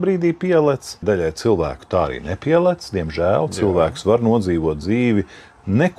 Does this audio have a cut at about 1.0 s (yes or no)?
yes